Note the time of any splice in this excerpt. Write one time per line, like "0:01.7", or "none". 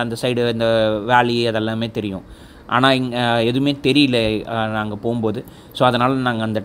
none

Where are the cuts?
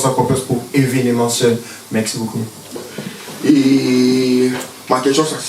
0:02.8

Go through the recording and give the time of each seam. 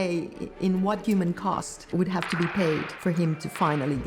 0:01.0
0:02.9

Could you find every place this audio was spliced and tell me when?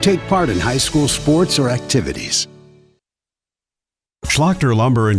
0:03.7

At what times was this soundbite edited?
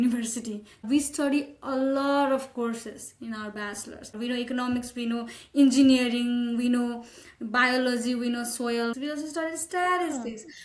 0:00.8
0:04.1
0:08.9

